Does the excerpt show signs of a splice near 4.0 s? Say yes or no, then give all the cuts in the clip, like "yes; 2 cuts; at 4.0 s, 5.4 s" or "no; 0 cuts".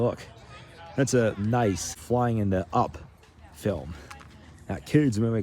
no; 1 cut; at 2.0 s